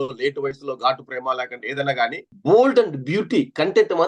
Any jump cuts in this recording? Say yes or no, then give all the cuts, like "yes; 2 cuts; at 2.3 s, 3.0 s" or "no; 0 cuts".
yes; 1 cut; at 2.3 s